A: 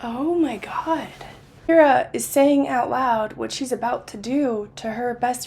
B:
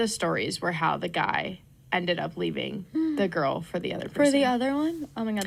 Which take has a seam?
A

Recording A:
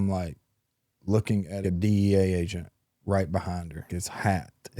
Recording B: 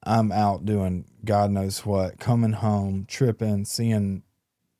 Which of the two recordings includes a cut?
A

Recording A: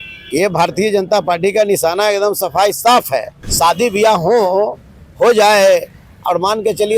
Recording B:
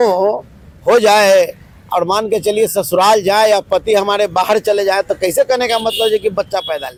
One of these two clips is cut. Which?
A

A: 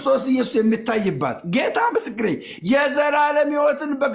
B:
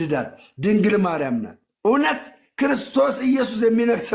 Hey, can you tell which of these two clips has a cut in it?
B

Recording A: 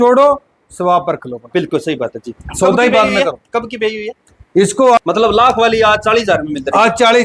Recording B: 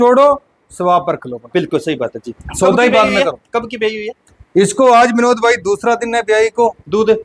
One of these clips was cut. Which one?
A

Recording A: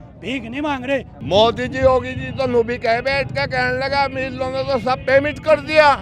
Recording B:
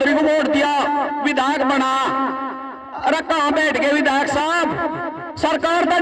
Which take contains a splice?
A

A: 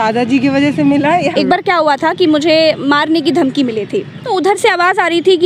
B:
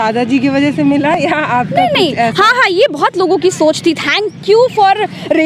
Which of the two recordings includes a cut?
A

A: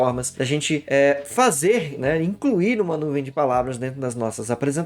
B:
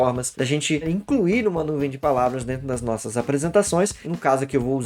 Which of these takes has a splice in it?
B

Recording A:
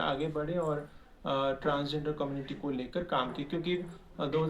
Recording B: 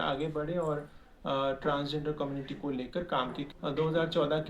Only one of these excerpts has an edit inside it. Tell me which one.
B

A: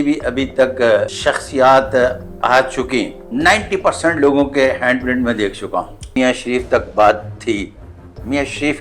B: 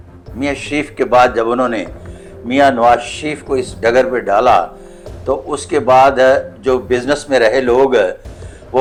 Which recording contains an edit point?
A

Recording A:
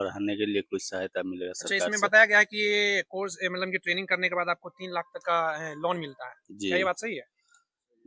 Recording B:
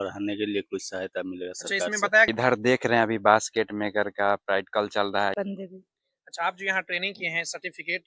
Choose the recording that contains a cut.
B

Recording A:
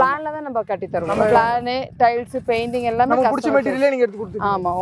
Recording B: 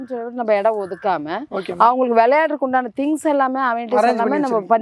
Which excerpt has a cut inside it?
A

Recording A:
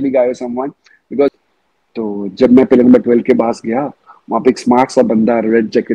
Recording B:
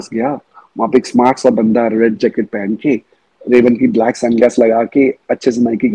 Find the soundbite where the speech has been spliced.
A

